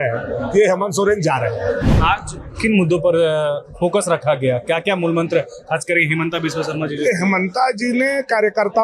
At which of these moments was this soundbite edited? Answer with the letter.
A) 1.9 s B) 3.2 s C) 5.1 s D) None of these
A